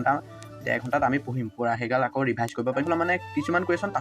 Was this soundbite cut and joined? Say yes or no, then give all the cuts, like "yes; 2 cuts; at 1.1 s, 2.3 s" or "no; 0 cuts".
yes; 1 cut; at 2.8 s